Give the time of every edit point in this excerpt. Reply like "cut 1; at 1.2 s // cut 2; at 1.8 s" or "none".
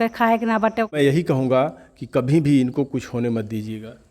cut 1; at 1.0 s